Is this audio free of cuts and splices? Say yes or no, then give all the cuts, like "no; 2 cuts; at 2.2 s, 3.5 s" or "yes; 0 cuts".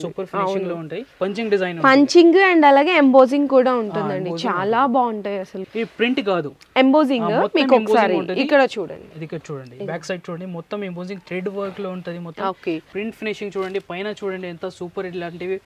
no; 3 cuts; at 1.0 s, 5.6 s, 12.9 s